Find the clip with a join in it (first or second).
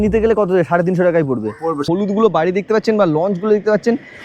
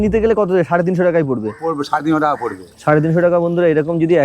first